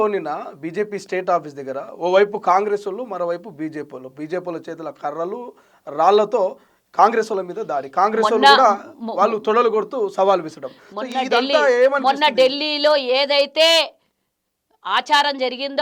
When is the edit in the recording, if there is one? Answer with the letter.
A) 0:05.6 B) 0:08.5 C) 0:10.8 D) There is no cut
D